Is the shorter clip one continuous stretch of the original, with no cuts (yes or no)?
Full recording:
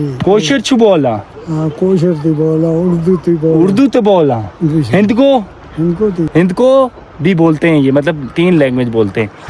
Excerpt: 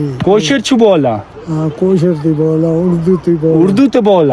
yes